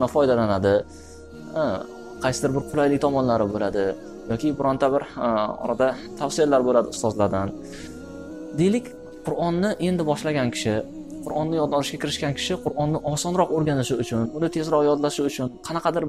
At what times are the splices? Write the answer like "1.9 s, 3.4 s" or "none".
none